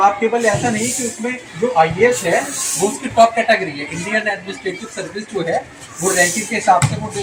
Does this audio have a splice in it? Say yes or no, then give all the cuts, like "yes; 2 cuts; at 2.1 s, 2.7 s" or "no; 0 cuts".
no; 0 cuts